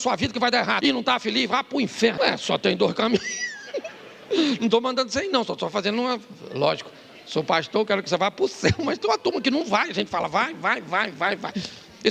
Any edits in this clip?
yes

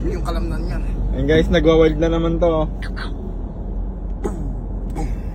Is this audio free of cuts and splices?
yes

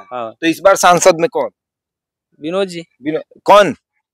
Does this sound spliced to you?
no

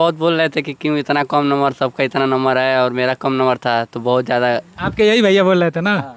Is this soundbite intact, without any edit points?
yes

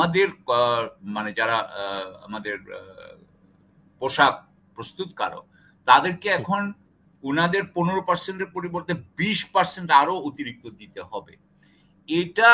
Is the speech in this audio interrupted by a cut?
no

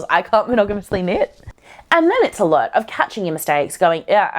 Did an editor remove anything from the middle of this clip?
yes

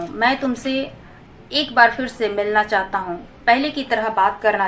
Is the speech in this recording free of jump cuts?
yes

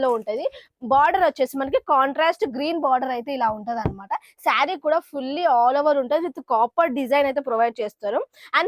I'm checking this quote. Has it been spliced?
no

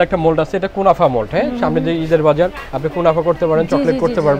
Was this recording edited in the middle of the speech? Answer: no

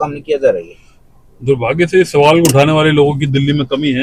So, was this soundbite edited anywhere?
no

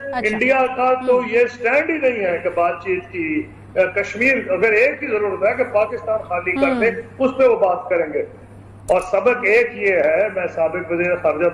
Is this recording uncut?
no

